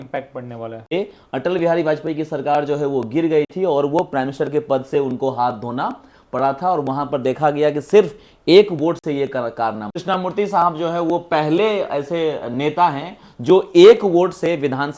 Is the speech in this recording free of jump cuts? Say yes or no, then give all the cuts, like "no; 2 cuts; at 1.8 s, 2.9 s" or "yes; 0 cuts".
no; 2 cuts; at 0.9 s, 10.0 s